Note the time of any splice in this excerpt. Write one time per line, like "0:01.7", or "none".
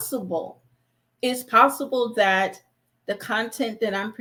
none